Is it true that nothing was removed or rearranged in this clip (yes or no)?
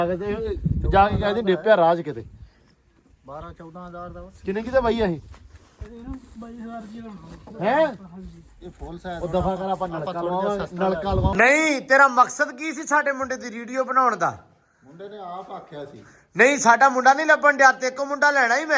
no